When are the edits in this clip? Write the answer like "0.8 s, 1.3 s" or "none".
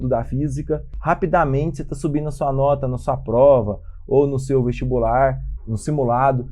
0.9 s, 5.5 s